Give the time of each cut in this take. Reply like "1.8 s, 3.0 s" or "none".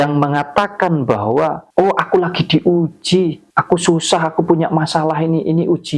1.6 s